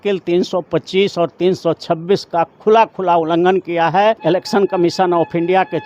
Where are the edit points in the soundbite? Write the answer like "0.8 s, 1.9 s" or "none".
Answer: 4.2 s